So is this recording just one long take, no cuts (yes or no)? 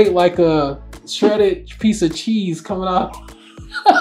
yes